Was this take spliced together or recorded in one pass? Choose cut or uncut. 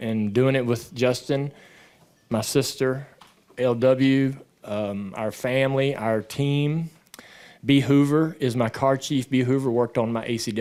uncut